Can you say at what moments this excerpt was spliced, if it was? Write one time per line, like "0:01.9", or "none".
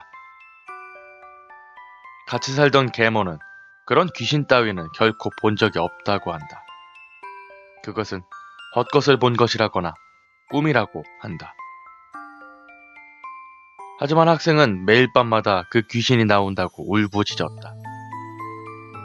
none